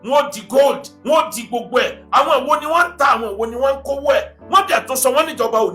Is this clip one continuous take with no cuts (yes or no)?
yes